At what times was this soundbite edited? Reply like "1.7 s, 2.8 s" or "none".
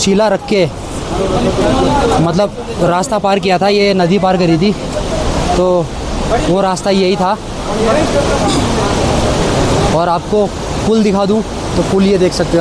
none